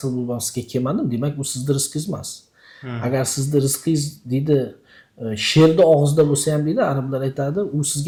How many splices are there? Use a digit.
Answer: 0